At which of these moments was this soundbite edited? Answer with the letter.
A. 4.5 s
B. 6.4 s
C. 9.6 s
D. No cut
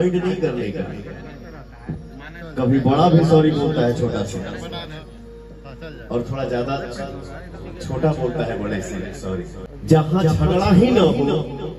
C